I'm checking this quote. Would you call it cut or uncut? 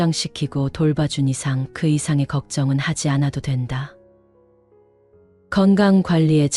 uncut